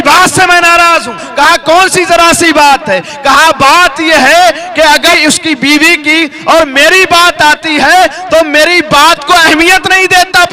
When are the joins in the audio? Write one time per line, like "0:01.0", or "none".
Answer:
none